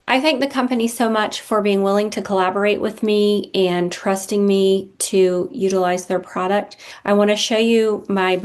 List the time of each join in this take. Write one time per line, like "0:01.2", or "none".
none